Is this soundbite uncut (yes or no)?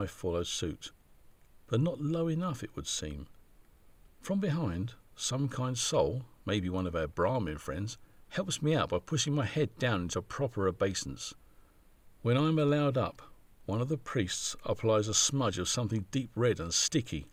yes